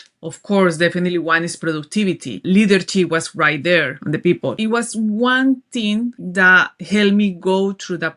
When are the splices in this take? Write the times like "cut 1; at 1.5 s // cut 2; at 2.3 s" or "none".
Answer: cut 1; at 2.4 s // cut 2; at 4.3 s // cut 3; at 6.2 s